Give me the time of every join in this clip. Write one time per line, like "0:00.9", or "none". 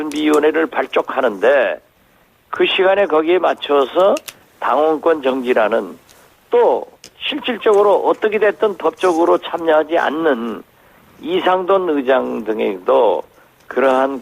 0:08.5